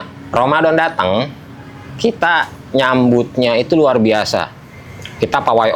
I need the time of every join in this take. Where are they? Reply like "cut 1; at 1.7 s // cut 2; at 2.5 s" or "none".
none